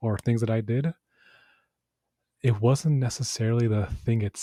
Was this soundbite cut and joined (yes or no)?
no